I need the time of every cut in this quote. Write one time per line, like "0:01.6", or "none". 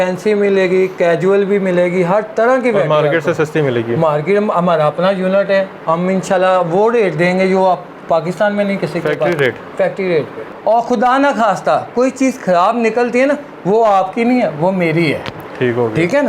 0:10.5